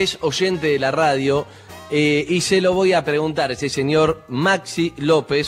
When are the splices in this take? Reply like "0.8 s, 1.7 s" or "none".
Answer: 2.2 s

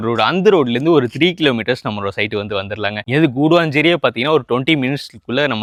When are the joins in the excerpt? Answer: none

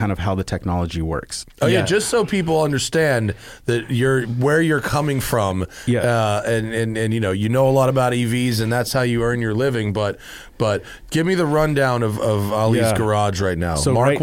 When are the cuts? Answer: 1.4 s

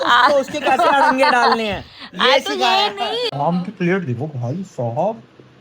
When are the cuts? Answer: 3.3 s

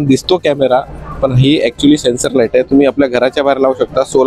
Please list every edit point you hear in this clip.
none

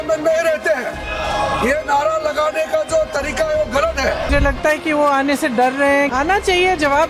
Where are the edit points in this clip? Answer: 4.3 s, 6.1 s

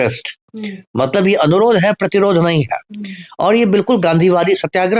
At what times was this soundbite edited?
none

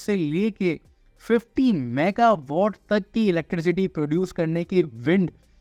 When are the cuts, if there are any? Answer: none

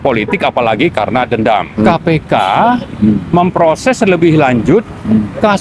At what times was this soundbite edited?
1.9 s

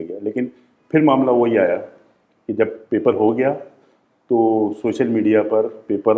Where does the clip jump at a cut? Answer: none

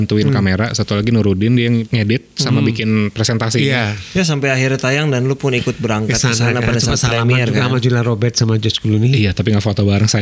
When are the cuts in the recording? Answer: 1.8 s, 4.0 s

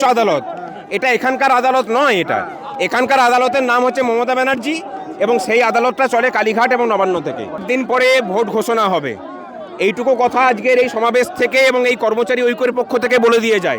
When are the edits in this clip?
7.6 s

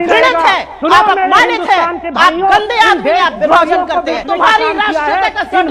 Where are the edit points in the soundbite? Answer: 4.2 s

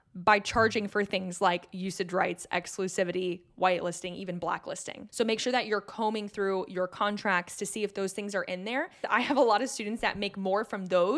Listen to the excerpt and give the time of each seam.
5.0 s, 9.0 s

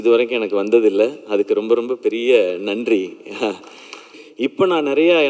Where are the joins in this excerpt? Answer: 4.2 s

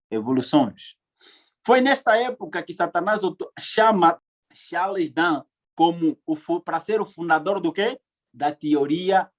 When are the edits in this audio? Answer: 4.2 s

